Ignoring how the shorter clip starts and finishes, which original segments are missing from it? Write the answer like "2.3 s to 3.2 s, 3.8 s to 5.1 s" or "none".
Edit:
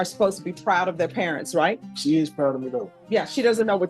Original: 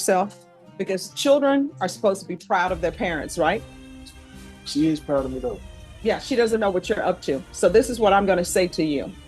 3.7 s to 4.6 s, 5.6 s to 5.8 s

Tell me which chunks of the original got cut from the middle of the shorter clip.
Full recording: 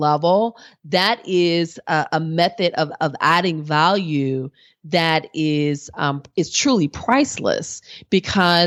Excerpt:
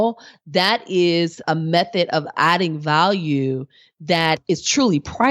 1.8 s to 2.1 s, 3.0 s to 3.1 s, 5.2 s to 6.3 s

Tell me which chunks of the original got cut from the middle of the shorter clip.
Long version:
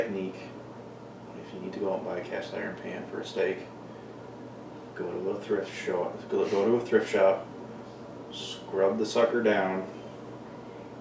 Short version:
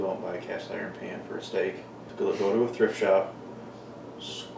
3.9 s to 6.2 s

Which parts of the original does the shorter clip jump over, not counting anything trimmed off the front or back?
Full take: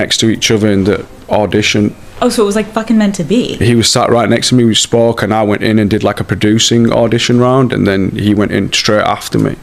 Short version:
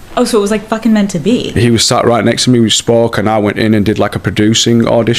none

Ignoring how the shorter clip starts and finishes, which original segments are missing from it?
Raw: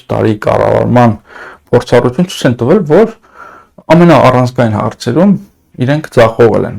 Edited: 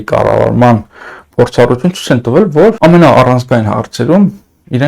3.1 s to 3.8 s

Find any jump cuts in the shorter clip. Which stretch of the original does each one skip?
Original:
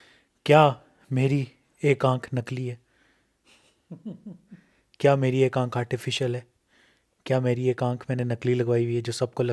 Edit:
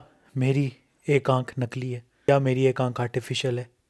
2.8 s to 4.8 s

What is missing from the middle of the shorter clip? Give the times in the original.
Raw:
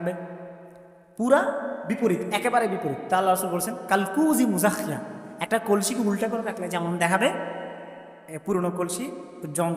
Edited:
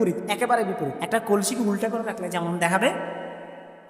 3.0 s to 5.3 s

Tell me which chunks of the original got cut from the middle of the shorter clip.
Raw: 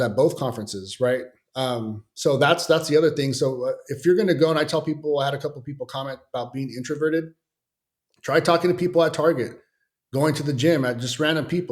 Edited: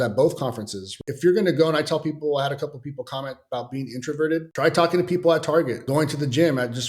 0.9 s to 3.8 s, 7.3 s to 8.2 s, 9.5 s to 10.0 s

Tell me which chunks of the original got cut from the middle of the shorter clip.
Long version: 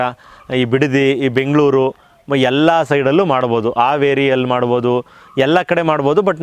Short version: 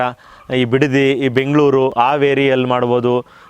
1.9 s to 3.7 s

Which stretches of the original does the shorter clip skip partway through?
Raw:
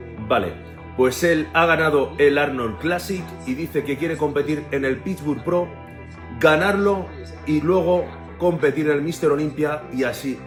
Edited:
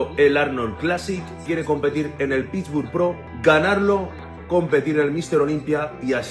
3.4 s to 3.9 s, 5.8 s to 6.2 s, 7.3 s to 8.2 s

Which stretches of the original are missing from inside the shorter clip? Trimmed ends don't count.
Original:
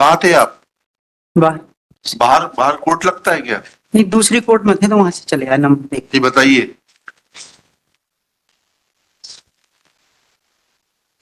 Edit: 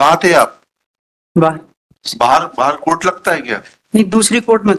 none

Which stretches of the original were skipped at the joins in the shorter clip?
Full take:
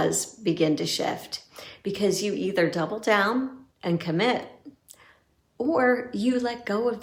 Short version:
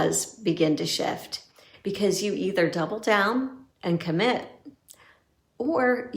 none

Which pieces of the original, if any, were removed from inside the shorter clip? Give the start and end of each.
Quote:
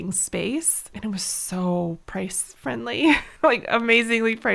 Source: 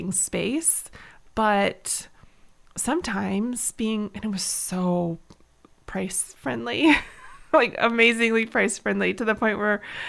0.9 s to 4.1 s, 5.2 s to 5.8 s, 7.1 s to 7.4 s

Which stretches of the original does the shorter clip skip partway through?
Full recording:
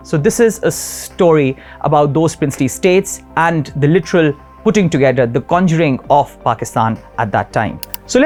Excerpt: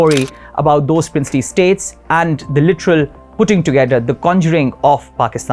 none

